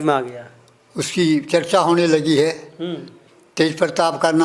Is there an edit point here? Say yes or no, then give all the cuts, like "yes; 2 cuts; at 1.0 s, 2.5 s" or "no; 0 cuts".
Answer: no; 0 cuts